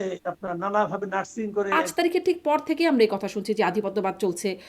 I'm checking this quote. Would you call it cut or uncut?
cut